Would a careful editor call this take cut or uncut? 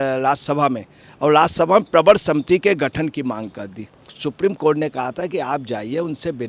cut